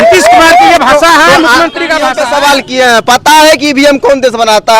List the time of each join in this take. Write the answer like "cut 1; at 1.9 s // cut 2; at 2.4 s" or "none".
cut 1; at 2.1 s